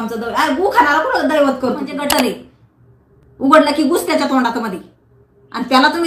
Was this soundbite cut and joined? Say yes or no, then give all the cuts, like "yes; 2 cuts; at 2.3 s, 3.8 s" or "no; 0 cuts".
yes; 1 cut; at 2.0 s